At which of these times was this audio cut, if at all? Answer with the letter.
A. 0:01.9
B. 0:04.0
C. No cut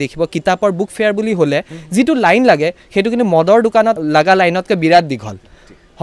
B